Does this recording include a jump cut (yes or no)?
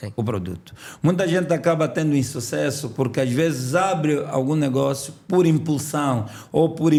no